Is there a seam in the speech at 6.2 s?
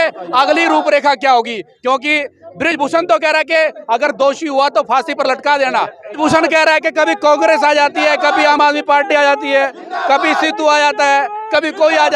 yes; 1 cut; at 6.2 s

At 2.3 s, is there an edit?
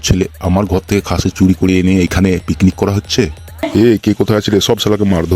no; 1 cut; at 3.7 s

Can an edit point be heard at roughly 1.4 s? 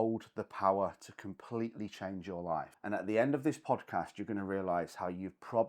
no; 1 cut; at 2.7 s

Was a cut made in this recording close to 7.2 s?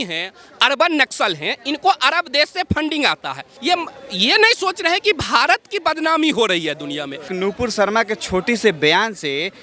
yes; 2 cuts; at 3.4 s, 7.2 s

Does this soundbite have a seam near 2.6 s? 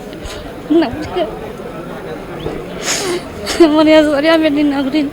no; 0 cuts

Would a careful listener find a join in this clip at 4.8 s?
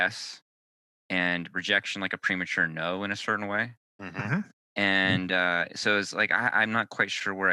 no; 0 cuts

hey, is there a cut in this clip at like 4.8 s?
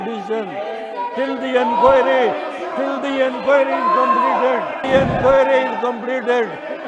yes; 1 cut; at 4.8 s

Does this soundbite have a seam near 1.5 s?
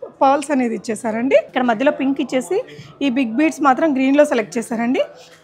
yes; 1 cut; at 1.5 s

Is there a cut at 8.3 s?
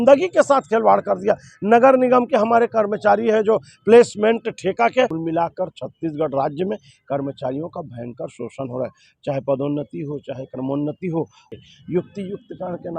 no; 2 cuts; at 5.1 s, 11.4 s

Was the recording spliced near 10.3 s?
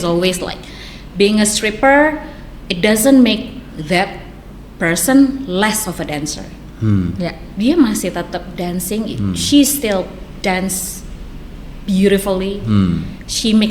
no; 0 cuts

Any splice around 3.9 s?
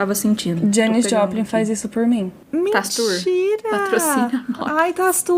no; 1 cut; at 2.4 s

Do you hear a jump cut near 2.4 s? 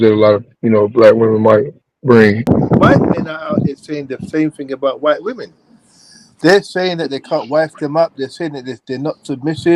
yes; 1 cut; at 2.4 s

